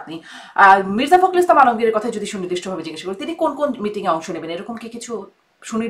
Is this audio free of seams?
yes; 0 cuts

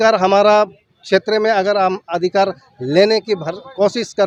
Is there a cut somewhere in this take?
no; 0 cuts

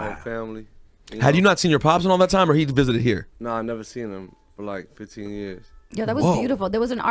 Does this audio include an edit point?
no; 0 cuts

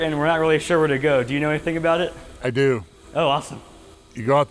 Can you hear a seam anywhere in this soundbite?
no; 0 cuts

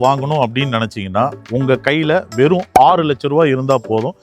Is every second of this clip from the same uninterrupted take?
yes; 0 cuts

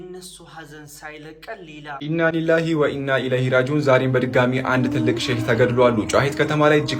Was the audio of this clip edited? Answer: yes; 1 cut; at 2.0 s

